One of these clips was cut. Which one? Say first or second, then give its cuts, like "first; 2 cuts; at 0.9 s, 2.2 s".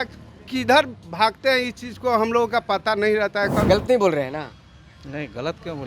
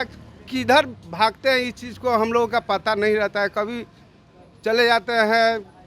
first; 1 cut; at 3.6 s